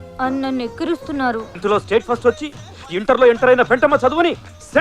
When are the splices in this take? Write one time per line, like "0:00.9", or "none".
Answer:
0:01.5